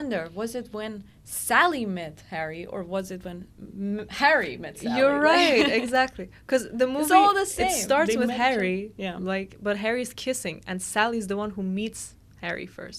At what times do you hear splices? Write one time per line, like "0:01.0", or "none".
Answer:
none